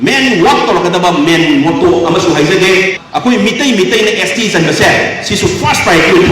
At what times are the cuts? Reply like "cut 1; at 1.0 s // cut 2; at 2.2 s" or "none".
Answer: cut 1; at 2.9 s